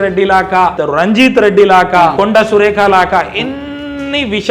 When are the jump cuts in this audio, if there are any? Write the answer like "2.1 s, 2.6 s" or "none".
0.8 s, 2.1 s

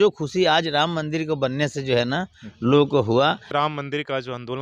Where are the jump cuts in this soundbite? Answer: 3.5 s

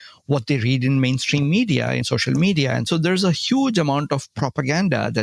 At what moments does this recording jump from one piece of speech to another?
2.0 s, 2.9 s

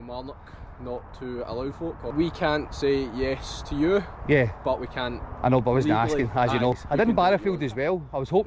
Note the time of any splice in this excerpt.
2.0 s, 6.8 s

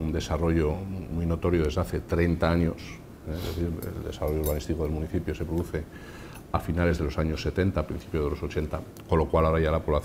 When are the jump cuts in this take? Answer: none

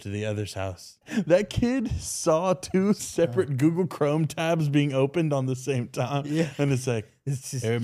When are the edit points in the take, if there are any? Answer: 1.0 s, 3.1 s

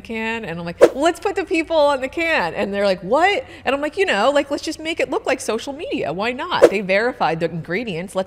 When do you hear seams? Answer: none

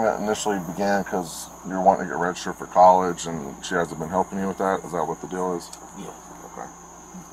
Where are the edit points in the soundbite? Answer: none

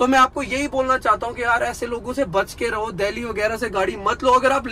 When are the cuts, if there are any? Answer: none

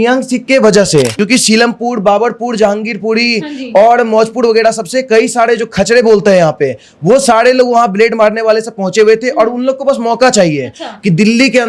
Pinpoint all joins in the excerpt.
1.1 s

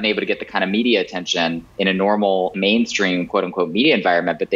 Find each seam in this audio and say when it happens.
1.7 s, 2.5 s

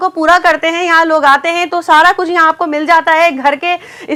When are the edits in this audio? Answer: none

